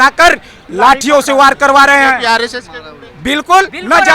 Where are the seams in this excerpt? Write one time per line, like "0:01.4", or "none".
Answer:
none